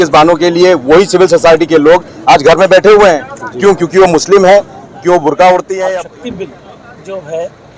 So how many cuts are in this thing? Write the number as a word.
one